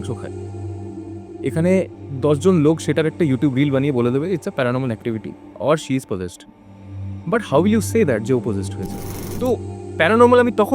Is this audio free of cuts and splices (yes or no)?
no